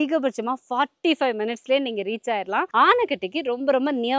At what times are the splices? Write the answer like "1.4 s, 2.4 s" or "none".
2.7 s